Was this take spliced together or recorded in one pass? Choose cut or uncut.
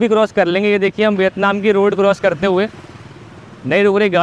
uncut